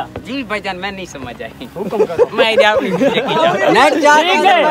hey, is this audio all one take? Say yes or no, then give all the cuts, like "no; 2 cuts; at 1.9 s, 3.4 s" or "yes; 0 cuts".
yes; 0 cuts